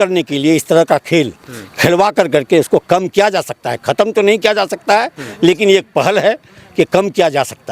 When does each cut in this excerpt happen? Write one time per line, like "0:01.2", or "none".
none

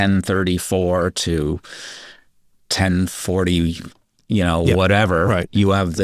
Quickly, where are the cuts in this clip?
none

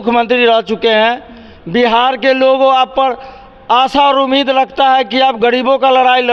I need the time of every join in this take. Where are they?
none

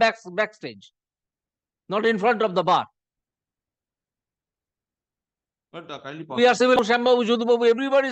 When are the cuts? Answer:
0:06.7

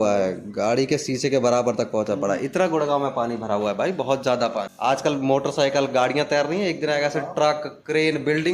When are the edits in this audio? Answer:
0:04.7

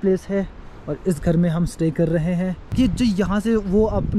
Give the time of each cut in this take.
0:02.6

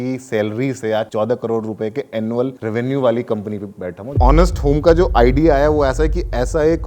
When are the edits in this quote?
0:01.1
0:02.6
0:04.1

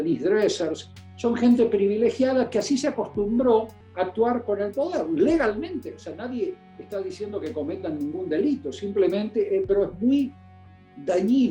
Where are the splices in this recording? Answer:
none

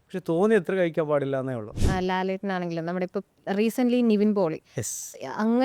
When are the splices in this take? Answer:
0:01.8

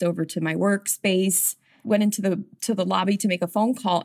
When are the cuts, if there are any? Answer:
0:01.7

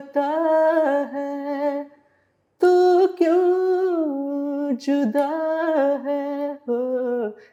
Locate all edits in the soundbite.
none

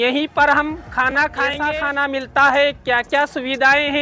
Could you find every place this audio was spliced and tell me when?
0:01.6

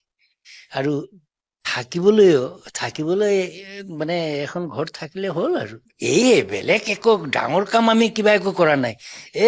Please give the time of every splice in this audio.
0:05.9

